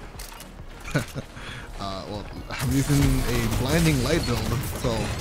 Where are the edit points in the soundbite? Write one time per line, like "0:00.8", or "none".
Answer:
none